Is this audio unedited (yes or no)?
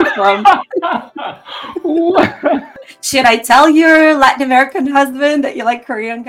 no